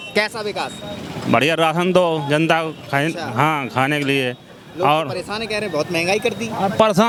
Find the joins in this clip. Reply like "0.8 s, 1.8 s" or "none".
none